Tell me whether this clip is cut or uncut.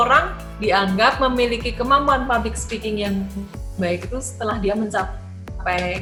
uncut